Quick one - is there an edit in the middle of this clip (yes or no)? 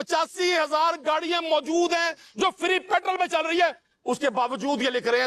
no